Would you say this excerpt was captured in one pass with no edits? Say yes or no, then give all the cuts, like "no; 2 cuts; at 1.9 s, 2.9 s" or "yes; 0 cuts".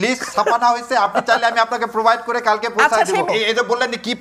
no; 1 cut; at 3.3 s